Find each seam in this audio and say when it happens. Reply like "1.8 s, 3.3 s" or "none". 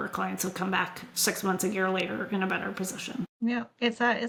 none